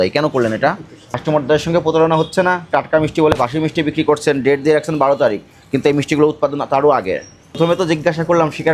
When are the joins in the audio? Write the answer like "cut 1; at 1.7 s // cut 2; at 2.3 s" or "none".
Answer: cut 1; at 1.0 s // cut 2; at 7.4 s